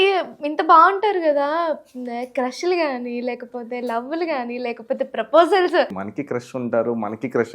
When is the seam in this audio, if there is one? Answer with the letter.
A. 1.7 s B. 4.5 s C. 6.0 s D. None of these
C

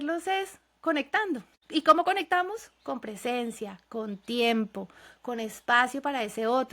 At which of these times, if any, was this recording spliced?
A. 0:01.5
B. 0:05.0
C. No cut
A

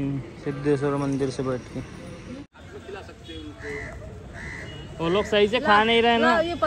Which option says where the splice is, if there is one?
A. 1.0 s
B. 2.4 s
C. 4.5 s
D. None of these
B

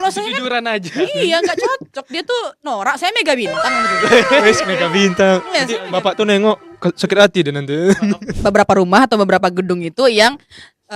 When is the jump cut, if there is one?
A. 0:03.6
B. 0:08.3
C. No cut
B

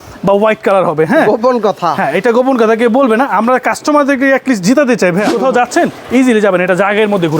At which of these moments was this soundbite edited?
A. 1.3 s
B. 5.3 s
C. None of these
B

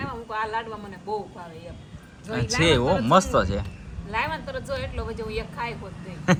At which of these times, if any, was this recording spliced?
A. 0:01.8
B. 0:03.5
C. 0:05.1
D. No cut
D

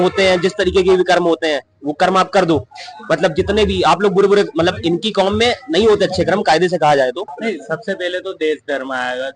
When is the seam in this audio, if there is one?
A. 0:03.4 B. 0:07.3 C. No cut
B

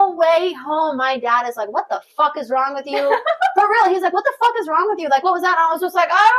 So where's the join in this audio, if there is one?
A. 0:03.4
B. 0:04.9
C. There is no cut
C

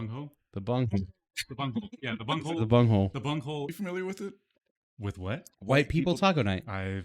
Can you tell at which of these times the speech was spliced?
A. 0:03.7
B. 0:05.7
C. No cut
A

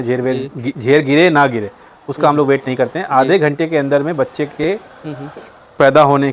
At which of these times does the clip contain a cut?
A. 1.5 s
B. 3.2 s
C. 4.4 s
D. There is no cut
D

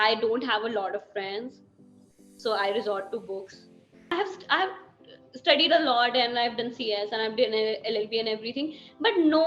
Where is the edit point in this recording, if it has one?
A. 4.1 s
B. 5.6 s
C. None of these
A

